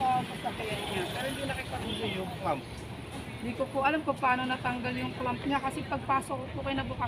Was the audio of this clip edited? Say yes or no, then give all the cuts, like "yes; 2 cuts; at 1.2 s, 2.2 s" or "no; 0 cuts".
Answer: no; 0 cuts